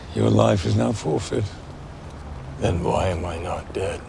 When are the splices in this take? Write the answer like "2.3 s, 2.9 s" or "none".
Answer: 2.0 s